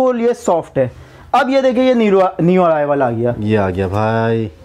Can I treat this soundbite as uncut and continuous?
yes; 0 cuts

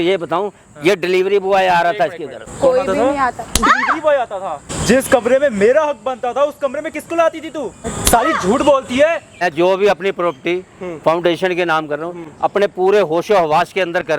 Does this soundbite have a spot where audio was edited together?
yes; 4 cuts; at 2.5 s, 4.7 s, 7.8 s, 9.4 s

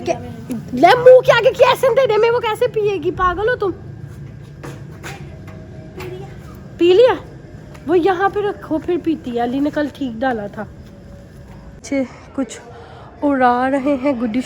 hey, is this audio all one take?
no; 1 cut; at 11.8 s

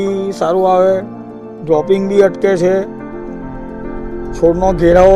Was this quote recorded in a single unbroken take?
yes; 0 cuts

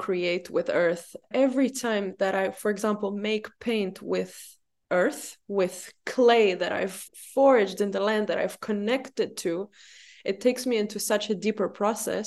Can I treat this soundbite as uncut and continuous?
no; 1 cut; at 1.3 s

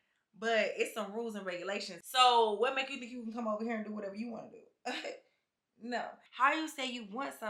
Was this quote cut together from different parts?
yes; 2 cuts; at 1.9 s, 6.2 s

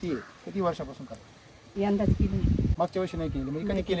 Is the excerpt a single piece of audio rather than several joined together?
yes; 0 cuts

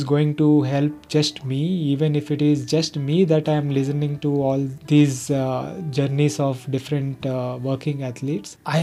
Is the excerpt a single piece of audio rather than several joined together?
yes; 0 cuts

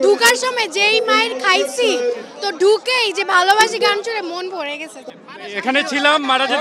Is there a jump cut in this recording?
yes; 1 cut; at 5.1 s

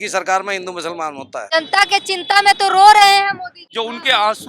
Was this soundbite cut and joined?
yes; 2 cuts; at 1.5 s, 3.6 s

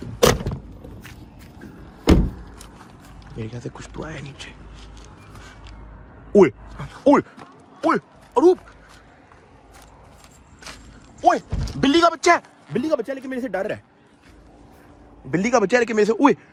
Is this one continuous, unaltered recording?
yes; 0 cuts

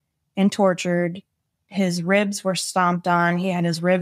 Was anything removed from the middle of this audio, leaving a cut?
no; 0 cuts

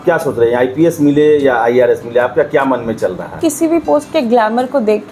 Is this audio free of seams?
no; 1 cut; at 3.4 s

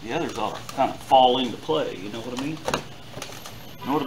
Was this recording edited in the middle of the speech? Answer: no; 0 cuts

